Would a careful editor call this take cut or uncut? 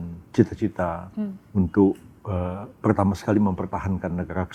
uncut